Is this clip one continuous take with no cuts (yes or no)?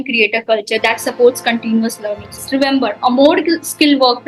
no